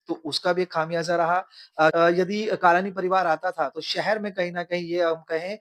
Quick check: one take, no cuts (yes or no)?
no